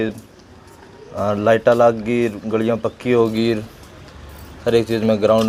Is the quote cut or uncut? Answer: uncut